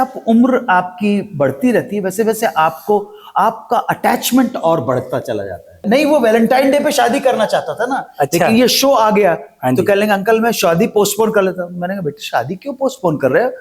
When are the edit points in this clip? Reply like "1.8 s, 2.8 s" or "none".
5.8 s